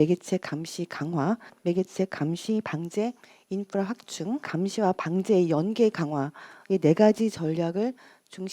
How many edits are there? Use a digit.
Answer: 2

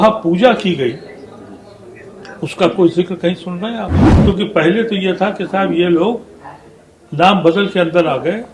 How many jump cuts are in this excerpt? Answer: 1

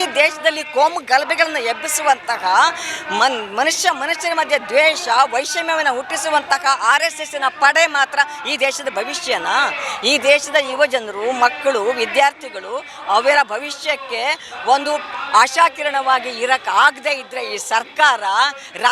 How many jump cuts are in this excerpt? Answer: 0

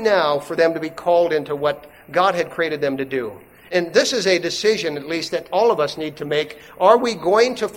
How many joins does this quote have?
1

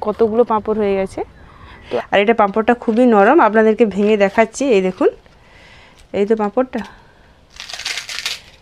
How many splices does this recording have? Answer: 1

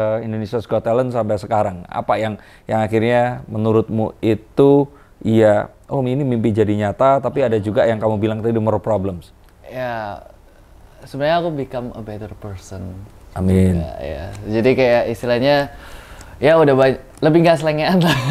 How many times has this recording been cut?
0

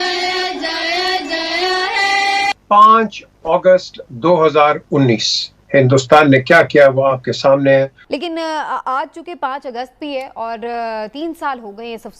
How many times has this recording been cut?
2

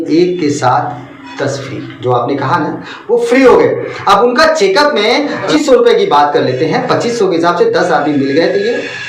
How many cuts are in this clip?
1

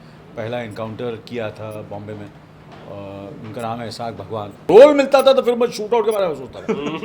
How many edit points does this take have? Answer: 1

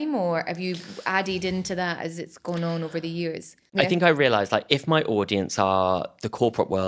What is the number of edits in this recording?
1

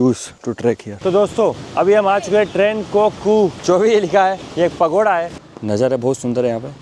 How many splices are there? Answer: 4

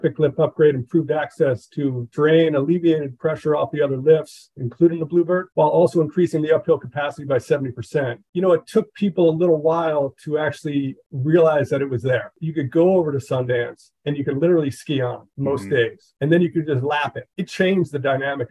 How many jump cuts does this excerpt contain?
2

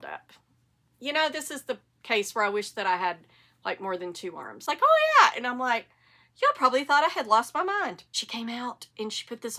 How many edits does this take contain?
2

